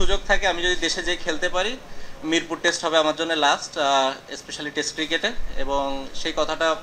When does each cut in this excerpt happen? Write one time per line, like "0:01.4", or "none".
none